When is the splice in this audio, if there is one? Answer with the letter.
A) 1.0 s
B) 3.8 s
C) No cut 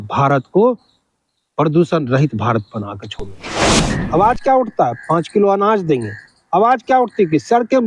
B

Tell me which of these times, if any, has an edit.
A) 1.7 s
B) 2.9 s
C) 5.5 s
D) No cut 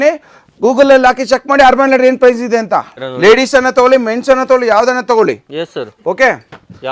B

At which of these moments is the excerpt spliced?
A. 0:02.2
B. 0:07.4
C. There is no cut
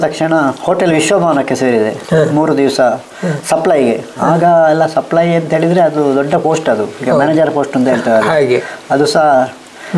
C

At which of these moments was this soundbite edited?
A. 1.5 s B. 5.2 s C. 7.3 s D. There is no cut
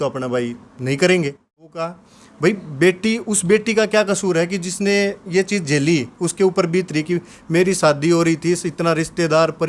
A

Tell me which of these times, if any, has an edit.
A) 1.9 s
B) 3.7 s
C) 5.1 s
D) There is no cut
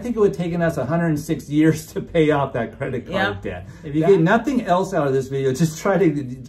B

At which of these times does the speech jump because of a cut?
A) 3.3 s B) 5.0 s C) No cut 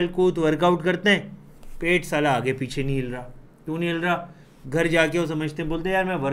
C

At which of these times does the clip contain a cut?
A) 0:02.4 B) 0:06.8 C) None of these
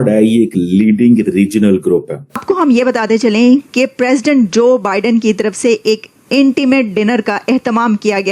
A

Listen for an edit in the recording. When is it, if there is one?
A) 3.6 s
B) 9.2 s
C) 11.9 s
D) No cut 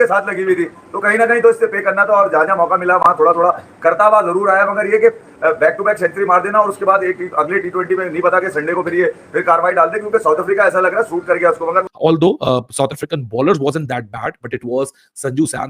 C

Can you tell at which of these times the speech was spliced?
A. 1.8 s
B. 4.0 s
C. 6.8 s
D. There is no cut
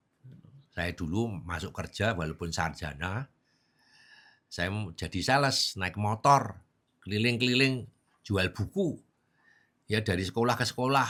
D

